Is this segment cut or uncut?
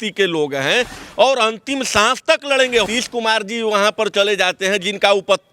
cut